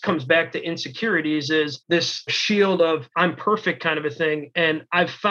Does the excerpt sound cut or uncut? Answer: cut